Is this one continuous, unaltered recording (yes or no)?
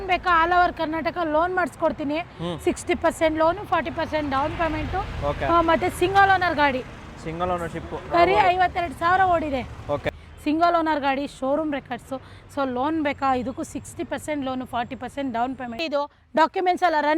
no